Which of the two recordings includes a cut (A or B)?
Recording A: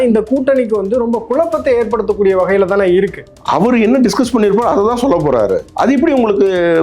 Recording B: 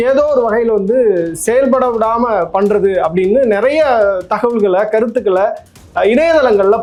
A